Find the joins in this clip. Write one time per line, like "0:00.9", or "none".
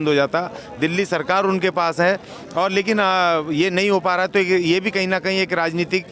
none